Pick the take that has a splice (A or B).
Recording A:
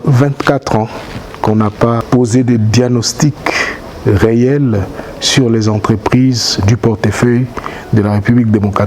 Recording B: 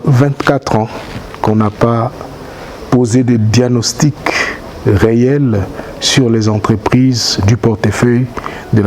A